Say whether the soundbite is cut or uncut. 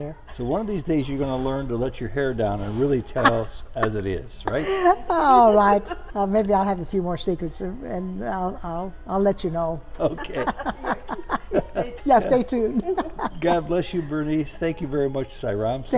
cut